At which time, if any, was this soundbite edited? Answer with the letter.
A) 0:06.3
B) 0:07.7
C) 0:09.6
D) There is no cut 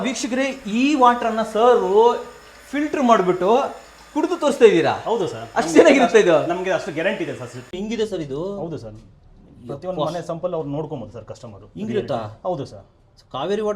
B